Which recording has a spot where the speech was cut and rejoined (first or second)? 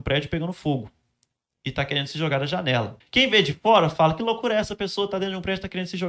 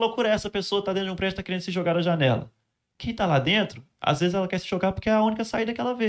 first